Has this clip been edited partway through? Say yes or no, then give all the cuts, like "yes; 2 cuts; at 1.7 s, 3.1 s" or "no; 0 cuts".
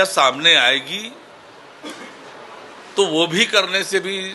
no; 0 cuts